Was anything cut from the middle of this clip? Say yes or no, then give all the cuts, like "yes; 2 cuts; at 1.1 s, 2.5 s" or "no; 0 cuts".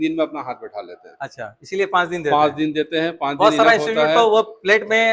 no; 0 cuts